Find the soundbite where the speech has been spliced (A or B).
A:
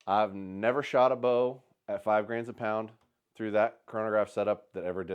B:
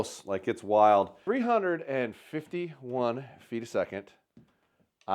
B